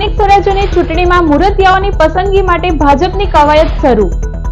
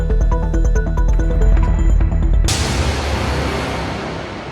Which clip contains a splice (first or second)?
second